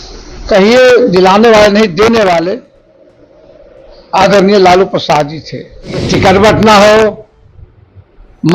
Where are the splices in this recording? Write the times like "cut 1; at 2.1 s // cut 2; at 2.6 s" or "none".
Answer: cut 1; at 6.1 s

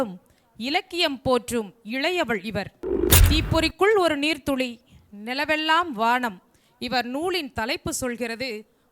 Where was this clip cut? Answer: none

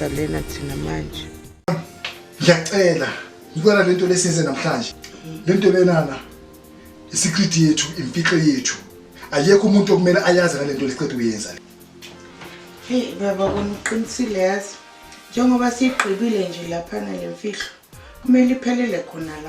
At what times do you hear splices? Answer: cut 1; at 1.7 s

